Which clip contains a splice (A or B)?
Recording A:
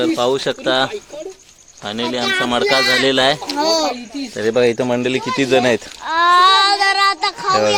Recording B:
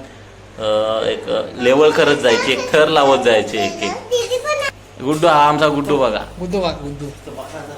B